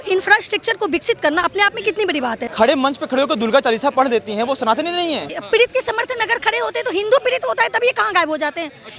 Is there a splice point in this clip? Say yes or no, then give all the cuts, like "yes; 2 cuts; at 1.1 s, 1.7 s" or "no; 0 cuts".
yes; 2 cuts; at 2.4 s, 5.3 s